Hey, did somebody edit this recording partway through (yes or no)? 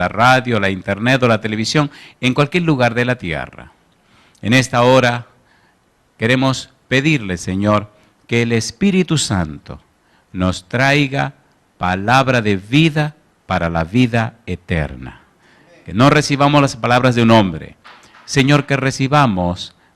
yes